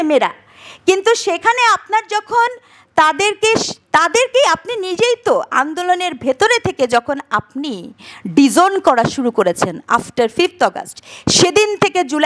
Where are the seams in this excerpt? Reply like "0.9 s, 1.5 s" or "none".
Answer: none